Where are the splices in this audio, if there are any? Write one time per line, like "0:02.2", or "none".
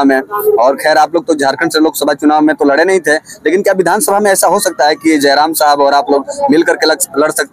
none